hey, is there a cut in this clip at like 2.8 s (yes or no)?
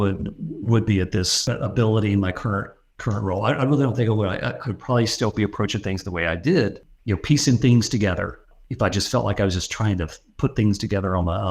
no